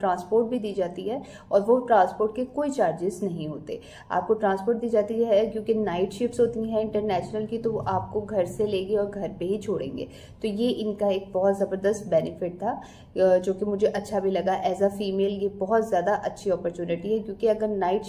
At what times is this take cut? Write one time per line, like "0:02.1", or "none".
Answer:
none